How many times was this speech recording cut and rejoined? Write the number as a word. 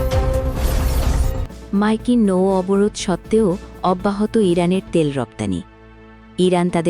one